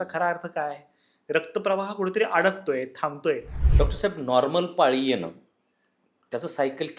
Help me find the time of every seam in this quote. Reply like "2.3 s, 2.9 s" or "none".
3.5 s